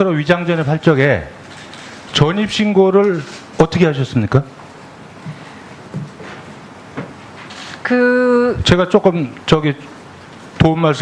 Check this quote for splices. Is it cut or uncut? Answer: uncut